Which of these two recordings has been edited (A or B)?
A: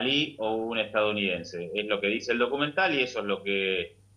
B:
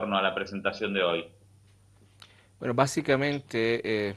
A